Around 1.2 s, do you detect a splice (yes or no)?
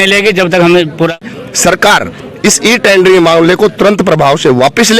yes